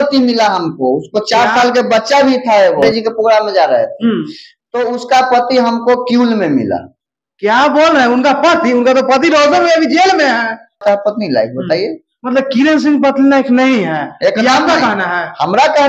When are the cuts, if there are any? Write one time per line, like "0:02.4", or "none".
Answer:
0:02.9
0:10.8